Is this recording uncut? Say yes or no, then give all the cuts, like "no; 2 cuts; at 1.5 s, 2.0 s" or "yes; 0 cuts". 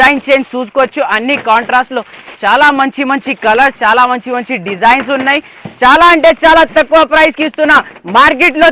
yes; 0 cuts